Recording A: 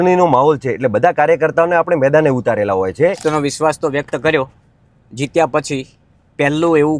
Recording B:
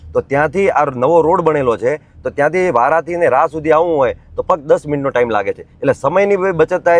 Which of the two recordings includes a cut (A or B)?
A